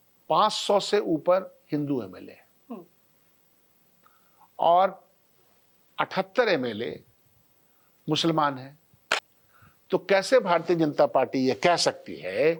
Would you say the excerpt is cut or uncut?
uncut